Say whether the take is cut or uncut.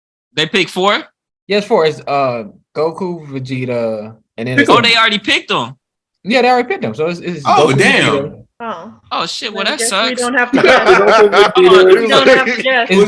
uncut